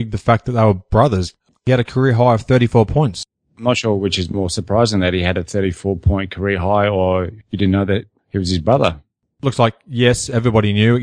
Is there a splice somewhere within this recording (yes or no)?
yes